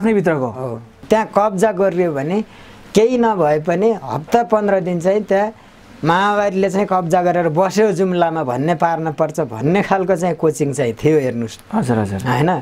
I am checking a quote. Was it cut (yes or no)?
yes